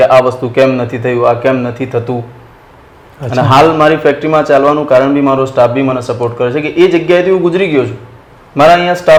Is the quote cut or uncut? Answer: uncut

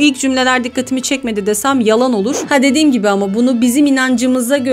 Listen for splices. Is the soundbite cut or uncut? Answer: cut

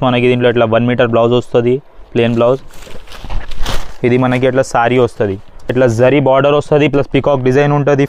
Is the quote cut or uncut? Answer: cut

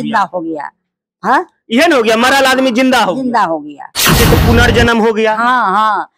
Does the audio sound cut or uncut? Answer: cut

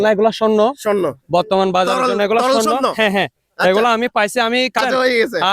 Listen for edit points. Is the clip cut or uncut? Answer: cut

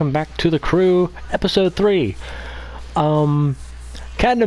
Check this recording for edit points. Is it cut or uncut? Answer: cut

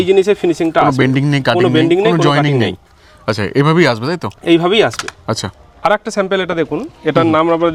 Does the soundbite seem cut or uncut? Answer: uncut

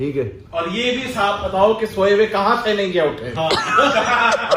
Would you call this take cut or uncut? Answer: cut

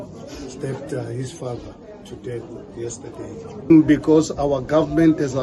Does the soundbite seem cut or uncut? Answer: cut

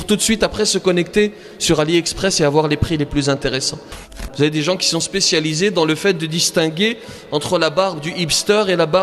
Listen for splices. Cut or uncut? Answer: cut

